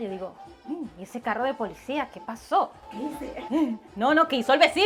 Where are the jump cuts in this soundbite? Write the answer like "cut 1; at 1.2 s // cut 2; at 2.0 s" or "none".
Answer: none